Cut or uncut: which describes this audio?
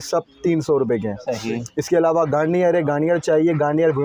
uncut